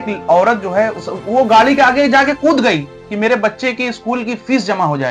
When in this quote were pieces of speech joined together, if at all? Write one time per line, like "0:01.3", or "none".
0:01.0

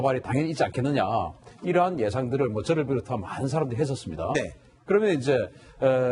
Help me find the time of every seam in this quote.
0:03.2

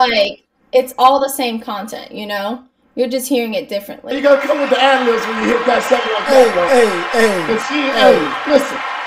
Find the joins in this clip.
0:04.1

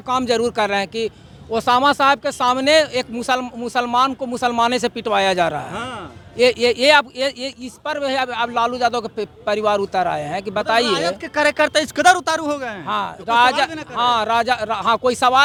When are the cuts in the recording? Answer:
none

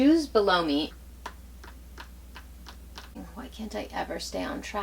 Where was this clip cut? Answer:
0:00.9
0:03.1

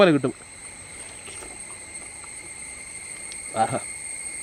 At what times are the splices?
none

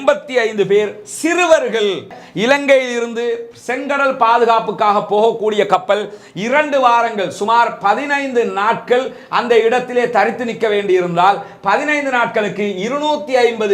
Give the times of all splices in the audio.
0:02.2

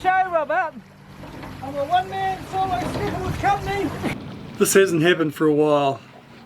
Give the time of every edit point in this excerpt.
0:04.2

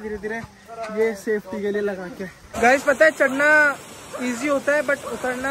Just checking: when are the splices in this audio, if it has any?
0:02.4

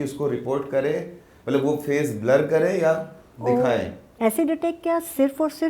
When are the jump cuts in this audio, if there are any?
0:04.1

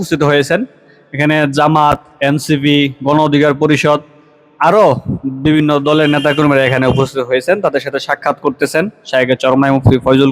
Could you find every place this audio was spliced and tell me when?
none

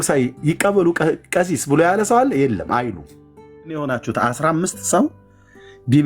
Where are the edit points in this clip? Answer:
0:03.8

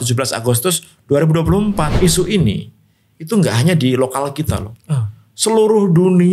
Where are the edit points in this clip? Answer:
0:01.9

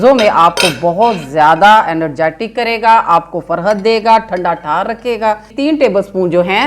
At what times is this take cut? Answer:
0:05.5

